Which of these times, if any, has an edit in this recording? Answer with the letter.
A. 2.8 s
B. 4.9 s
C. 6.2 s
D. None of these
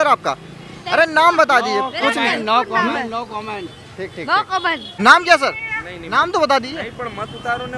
B